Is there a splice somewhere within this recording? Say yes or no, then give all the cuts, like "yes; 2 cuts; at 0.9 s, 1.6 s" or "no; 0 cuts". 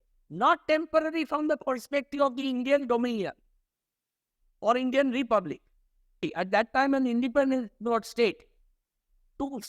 yes; 1 cut; at 6.2 s